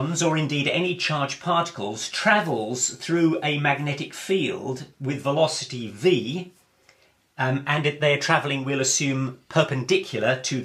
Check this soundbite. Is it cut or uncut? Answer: uncut